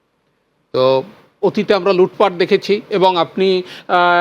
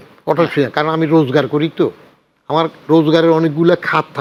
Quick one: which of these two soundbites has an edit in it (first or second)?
first